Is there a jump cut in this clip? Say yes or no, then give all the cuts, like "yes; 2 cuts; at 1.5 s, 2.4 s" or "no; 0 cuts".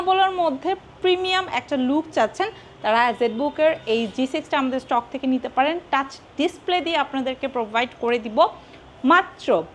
no; 0 cuts